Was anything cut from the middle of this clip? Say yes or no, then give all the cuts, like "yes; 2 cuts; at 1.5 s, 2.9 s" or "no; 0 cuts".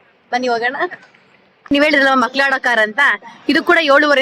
yes; 1 cut; at 1.7 s